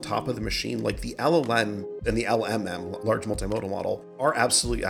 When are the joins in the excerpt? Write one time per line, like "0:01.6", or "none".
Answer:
0:02.0
0:03.0
0:04.2